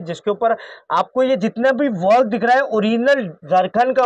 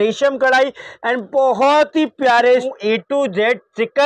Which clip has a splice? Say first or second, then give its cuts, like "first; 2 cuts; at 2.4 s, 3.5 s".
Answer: second; 1 cut; at 2.7 s